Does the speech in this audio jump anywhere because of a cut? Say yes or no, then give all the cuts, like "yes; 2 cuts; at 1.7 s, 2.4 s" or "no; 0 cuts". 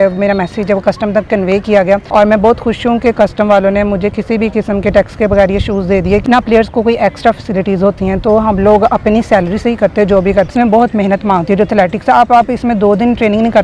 yes; 3 cuts; at 2.1 s, 6.2 s, 10.5 s